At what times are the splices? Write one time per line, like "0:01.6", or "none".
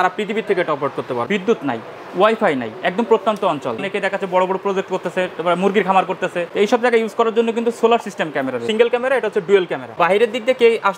0:01.2
0:03.8
0:06.4
0:08.7
0:09.9